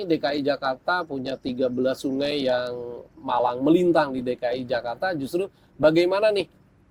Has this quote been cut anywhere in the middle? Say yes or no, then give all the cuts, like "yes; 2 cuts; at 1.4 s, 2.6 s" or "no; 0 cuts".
no; 0 cuts